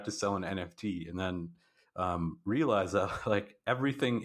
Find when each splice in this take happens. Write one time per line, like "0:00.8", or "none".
none